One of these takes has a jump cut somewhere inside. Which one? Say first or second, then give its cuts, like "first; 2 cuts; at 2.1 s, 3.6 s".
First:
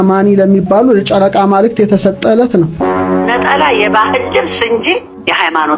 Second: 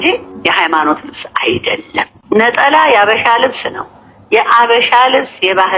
first; 1 cut; at 3.3 s